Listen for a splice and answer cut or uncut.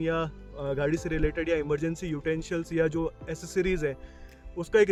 uncut